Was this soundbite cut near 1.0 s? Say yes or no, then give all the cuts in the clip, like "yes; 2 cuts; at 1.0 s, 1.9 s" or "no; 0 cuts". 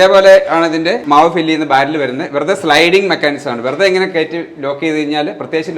yes; 1 cut; at 1.0 s